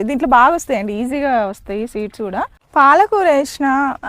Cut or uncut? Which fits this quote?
cut